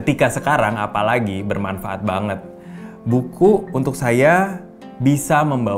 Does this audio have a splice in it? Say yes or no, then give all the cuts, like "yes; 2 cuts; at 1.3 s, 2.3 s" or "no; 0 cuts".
no; 0 cuts